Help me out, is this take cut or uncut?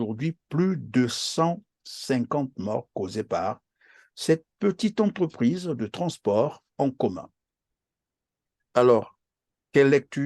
uncut